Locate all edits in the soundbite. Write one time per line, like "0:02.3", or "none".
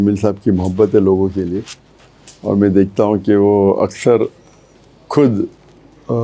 none